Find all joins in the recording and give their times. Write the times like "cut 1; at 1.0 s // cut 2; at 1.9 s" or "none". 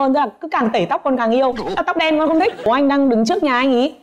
cut 1; at 2.6 s